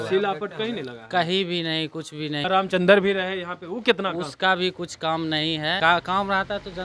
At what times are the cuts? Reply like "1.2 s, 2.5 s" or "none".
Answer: 2.5 s, 5.8 s